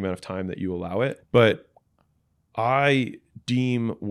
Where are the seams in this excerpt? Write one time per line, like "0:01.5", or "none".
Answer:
0:01.2